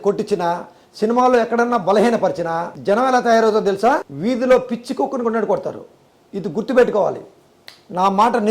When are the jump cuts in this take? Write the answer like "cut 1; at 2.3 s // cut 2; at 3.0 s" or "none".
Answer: cut 1; at 2.7 s // cut 2; at 4.1 s